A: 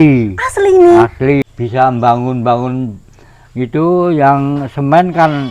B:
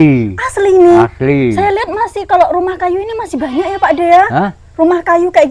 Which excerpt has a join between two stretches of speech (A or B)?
A